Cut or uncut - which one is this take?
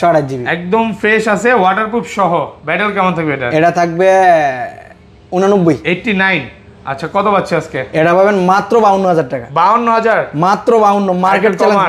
uncut